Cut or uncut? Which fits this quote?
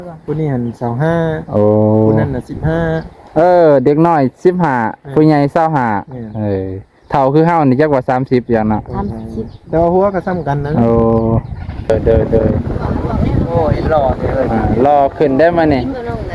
cut